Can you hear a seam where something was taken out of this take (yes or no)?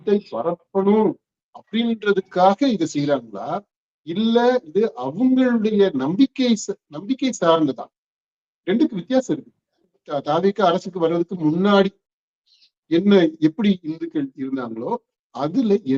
yes